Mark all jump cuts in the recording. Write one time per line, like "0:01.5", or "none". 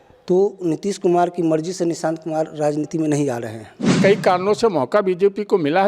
0:04.0